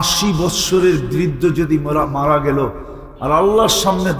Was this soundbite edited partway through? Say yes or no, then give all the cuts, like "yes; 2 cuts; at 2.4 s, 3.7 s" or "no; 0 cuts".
no; 0 cuts